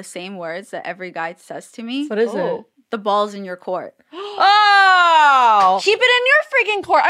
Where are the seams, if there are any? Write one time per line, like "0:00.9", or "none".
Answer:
0:02.1
0:05.8